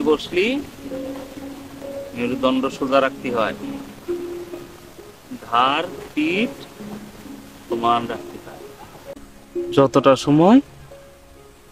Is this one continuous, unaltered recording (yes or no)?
no